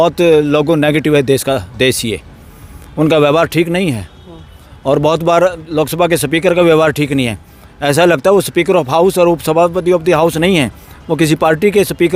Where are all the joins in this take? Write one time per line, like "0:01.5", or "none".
none

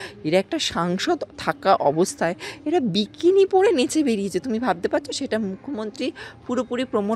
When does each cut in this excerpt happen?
none

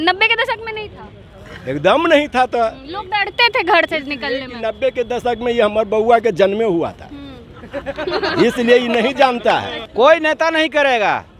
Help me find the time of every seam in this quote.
0:09.8

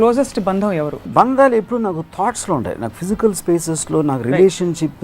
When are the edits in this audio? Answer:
0:01.1

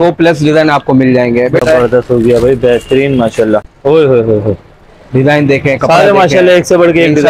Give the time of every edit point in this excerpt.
0:01.6
0:03.7

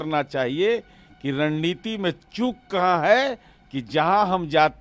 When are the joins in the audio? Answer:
none

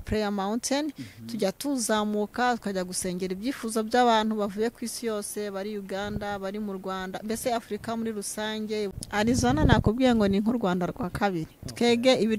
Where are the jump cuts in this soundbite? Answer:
0:09.0

